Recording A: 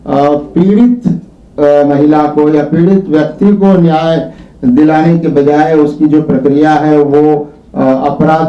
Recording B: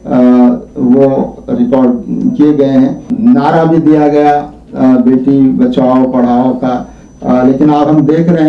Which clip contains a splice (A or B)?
B